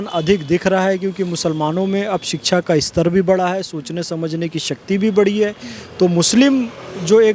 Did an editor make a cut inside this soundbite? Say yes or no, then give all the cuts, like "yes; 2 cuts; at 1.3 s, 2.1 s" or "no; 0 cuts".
no; 0 cuts